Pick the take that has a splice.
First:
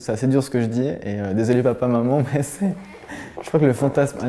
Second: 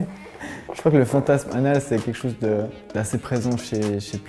second; 1 cut; at 2.8 s

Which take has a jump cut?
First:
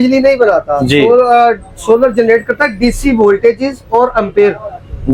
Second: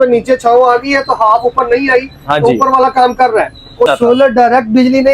second; 1 cut; at 3.9 s

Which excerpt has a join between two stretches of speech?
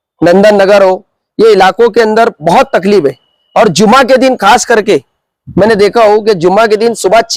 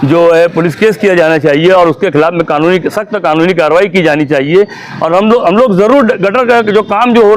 second; 1 cut; at 4.9 s

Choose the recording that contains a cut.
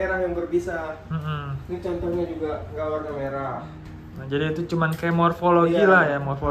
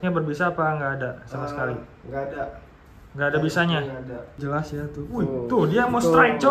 second; 1 cut; at 4.4 s

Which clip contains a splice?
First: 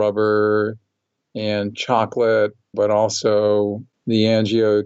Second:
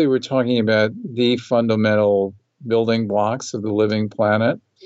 first; 2 cuts; at 2.7 s, 3.9 s

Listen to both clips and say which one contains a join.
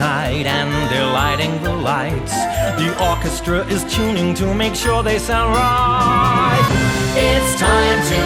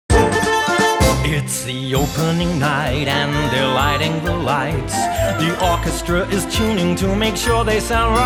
first; 1 cut; at 6.7 s

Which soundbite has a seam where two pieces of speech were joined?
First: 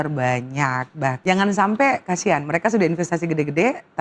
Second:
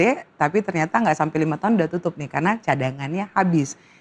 first; 1 cut; at 1.2 s

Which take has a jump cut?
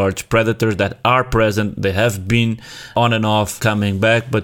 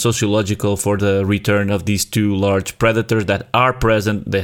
first; 1 cut; at 2.9 s

